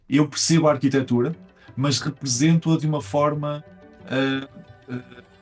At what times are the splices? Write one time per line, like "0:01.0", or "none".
none

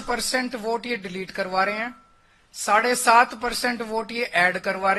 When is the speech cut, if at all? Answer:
none

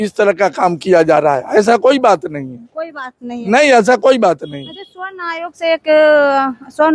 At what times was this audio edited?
none

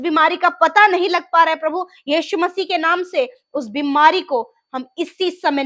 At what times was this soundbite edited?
none

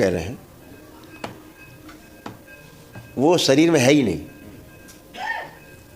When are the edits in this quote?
none

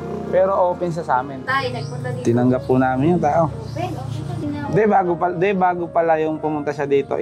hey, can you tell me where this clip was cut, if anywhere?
0:01.4
0:04.4

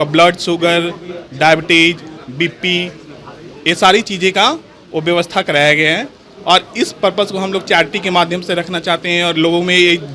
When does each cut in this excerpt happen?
none

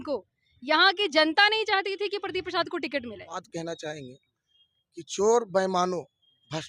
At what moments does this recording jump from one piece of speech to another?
0:03.5

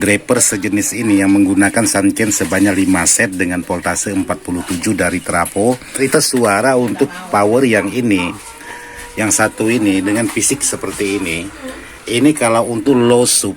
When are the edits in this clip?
0:06.0

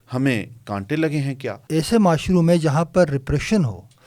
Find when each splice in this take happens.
0:01.6

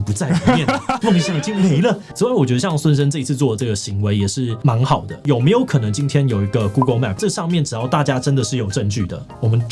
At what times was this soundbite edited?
0:02.1
0:05.0
0:07.2

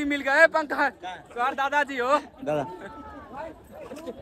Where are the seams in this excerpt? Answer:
none

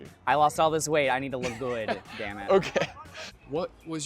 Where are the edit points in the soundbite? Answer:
0:03.0

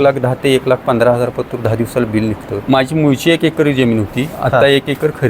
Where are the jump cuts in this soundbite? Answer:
0:02.5

